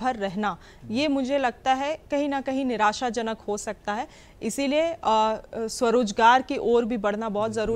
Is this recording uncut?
yes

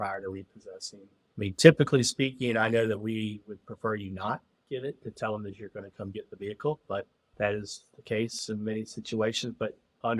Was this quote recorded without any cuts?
yes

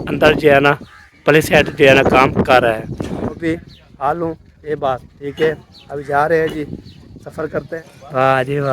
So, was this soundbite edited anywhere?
yes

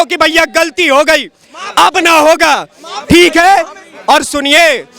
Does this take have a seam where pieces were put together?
no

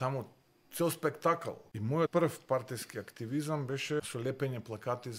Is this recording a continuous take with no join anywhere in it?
no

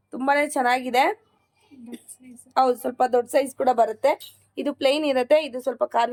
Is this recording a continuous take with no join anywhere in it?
yes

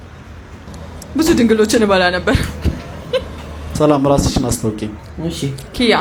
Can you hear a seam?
no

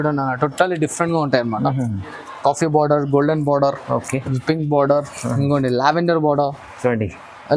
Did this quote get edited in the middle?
no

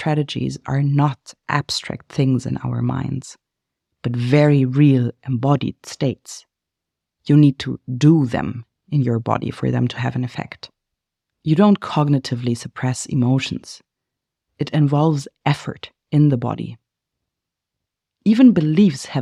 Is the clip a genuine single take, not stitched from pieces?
yes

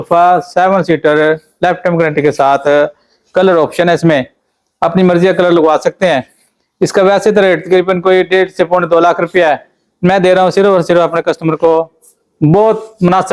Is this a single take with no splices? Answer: yes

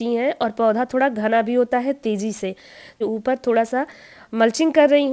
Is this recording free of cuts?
no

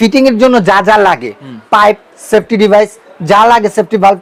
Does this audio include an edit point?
no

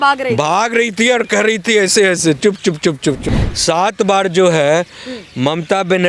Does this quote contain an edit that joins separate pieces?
yes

